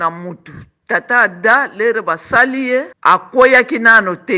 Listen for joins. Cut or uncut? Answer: cut